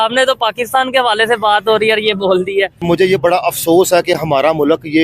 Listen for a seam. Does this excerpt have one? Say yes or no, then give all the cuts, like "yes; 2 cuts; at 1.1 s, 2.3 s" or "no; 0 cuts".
yes; 1 cut; at 2.8 s